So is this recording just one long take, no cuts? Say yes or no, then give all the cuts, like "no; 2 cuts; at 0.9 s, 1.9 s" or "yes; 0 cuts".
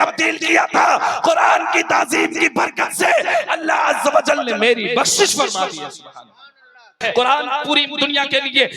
no; 1 cut; at 7.0 s